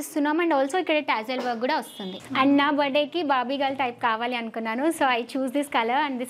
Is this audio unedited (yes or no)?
no